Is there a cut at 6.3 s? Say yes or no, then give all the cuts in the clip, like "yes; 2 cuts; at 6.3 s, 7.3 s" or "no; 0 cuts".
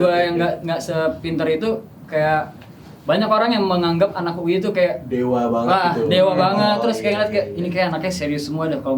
no; 0 cuts